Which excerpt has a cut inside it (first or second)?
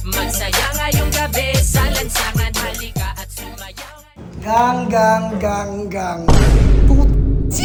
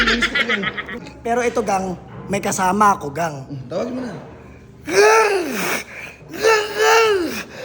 second